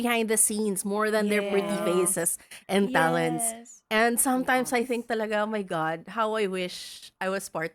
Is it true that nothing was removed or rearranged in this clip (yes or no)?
yes